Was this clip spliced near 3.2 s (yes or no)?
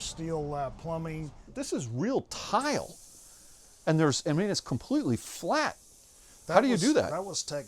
no